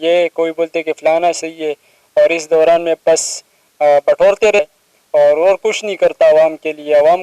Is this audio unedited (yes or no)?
no